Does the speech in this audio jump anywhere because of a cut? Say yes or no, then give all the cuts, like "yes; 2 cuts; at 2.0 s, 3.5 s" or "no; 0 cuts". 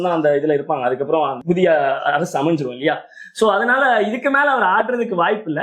yes; 1 cut; at 1.4 s